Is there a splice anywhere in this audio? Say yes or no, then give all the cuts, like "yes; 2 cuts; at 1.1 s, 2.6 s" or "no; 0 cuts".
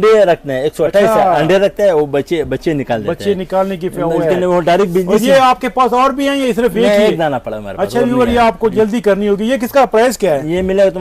no; 0 cuts